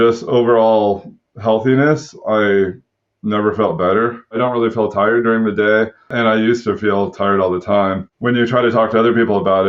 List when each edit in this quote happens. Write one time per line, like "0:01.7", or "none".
0:04.4
0:06.1
0:08.1